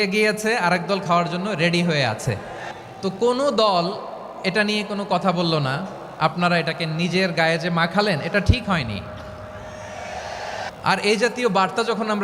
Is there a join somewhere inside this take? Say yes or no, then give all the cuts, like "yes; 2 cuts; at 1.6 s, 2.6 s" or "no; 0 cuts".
yes; 2 cuts; at 2.7 s, 10.7 s